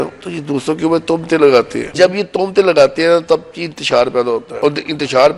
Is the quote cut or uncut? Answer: cut